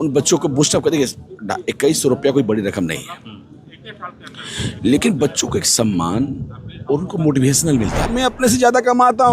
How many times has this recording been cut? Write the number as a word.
one